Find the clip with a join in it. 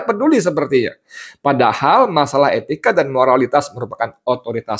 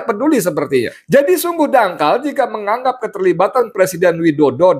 second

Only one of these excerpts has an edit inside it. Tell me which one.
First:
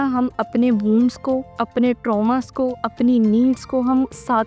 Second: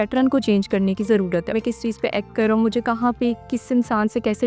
second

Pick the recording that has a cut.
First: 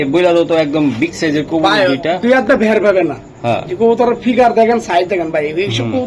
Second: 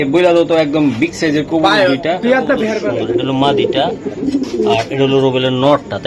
second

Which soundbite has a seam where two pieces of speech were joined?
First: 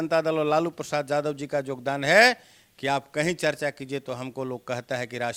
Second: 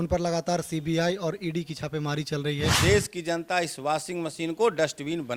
second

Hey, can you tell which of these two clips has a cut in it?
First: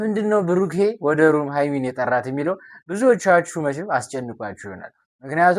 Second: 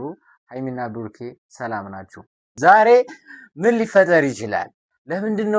second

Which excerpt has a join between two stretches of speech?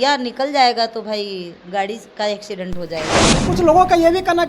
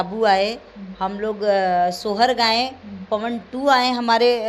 first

